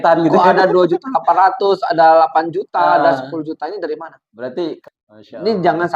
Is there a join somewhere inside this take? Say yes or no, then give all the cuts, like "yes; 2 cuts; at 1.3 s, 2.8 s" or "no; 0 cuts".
yes; 1 cut; at 4.7 s